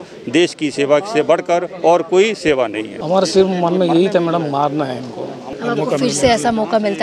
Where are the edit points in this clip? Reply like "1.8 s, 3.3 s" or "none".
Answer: 2.9 s, 5.5 s